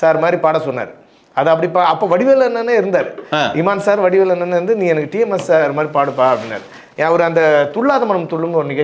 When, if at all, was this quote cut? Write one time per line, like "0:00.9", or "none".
none